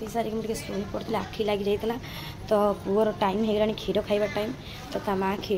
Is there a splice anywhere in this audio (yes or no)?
no